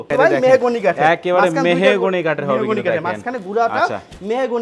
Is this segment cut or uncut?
uncut